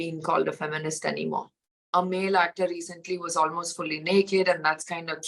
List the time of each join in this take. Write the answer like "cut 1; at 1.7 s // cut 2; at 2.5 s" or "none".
cut 1; at 1.9 s

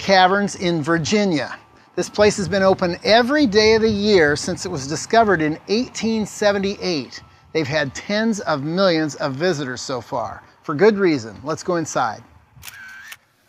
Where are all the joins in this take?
cut 1; at 4.2 s

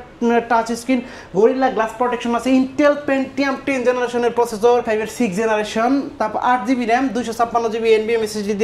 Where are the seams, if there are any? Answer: cut 1; at 4.8 s

